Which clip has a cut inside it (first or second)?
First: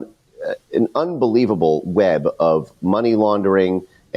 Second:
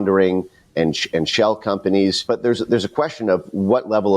second